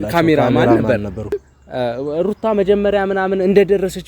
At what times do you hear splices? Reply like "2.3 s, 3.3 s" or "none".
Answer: 1.4 s